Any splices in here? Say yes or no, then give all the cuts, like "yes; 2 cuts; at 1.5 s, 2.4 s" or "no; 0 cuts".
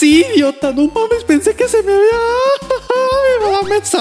no; 0 cuts